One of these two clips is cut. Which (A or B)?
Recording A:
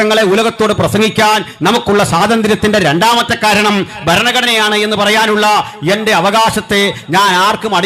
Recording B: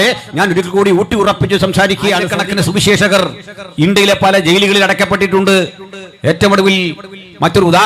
B